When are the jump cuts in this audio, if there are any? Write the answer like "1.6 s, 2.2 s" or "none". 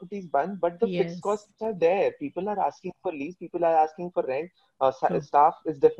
none